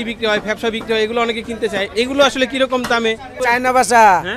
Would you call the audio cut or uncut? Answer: cut